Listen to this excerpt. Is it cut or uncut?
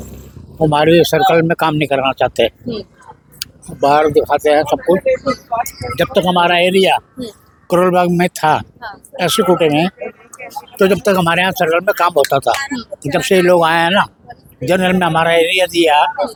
uncut